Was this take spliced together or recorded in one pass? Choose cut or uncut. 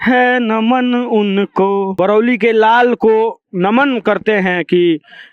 cut